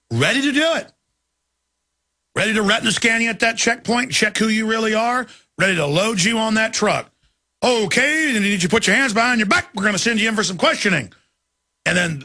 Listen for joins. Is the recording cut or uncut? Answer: uncut